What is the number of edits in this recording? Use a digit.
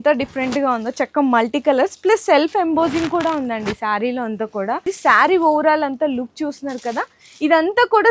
1